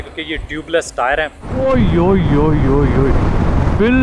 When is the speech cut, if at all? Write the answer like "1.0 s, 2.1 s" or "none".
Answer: 1.5 s